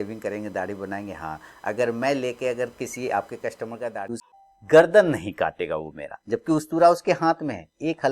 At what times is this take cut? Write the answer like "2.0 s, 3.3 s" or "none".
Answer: 4.3 s